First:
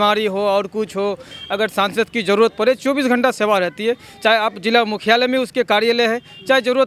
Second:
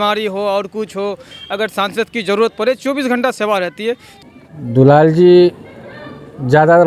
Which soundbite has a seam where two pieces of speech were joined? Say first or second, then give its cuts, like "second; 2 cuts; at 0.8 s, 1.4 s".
second; 1 cut; at 4.1 s